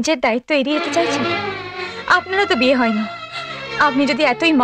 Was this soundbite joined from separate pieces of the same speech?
no; 0 cuts

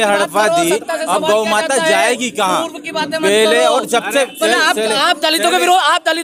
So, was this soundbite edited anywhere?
no; 0 cuts

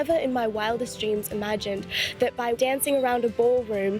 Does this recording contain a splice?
yes; 1 cut; at 2.6 s

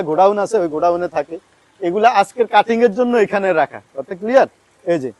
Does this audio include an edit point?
no; 0 cuts

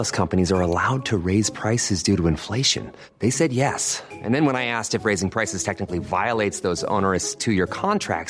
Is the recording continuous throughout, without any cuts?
yes; 0 cuts

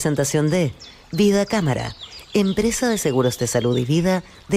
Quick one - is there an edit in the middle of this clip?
no; 0 cuts

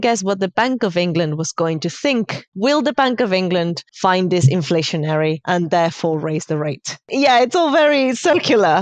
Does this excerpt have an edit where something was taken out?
yes; 4 cuts; at 2.4 s, 3.8 s, 5.4 s, 7.1 s

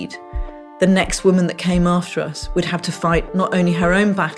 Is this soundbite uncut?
yes; 0 cuts

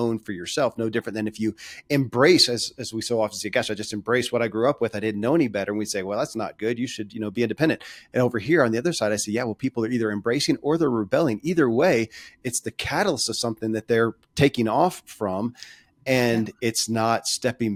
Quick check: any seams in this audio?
no; 0 cuts

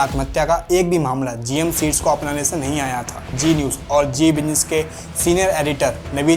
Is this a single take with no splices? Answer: no; 1 cut; at 3.3 s

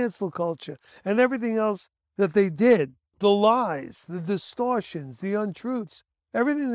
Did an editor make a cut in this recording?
yes; 1 cut; at 3.0 s

